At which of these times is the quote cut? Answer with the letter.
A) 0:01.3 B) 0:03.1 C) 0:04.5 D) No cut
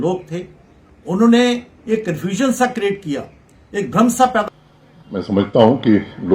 C